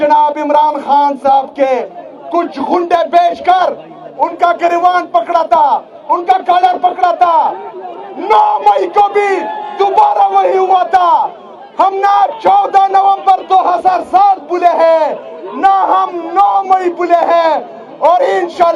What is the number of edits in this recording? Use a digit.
0